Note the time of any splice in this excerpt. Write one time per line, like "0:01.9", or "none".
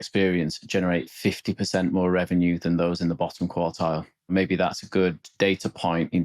0:04.3